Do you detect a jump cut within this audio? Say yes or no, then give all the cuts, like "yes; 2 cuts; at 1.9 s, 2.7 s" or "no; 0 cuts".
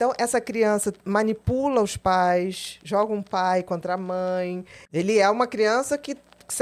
yes; 1 cut; at 4.7 s